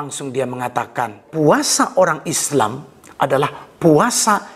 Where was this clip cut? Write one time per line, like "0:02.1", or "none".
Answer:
0:01.2